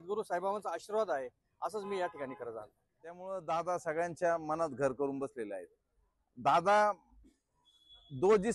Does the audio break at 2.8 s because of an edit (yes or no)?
yes